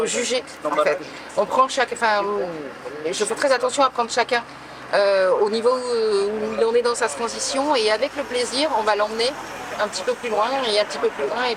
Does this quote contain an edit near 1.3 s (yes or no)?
no